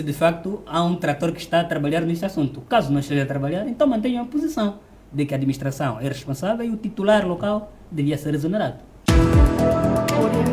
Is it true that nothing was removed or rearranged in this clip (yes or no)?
no